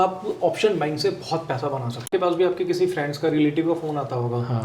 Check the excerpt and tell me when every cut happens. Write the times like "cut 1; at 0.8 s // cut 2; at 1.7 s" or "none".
cut 1; at 2.1 s